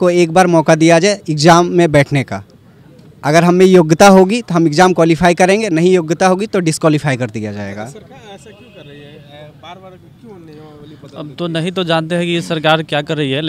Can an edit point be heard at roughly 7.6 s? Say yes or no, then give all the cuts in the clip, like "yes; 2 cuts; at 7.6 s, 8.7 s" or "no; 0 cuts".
no; 0 cuts